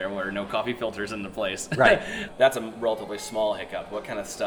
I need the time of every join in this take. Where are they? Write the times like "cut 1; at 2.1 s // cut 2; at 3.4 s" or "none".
cut 1; at 2.2 s